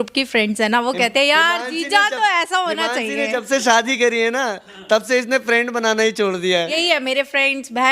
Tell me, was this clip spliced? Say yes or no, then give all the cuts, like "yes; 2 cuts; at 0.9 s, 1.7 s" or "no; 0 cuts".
yes; 1 cut; at 6.8 s